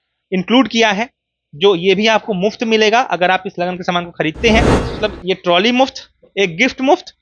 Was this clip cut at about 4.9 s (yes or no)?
yes